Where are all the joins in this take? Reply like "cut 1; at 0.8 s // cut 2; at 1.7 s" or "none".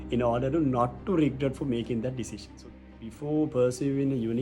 cut 1; at 2.7 s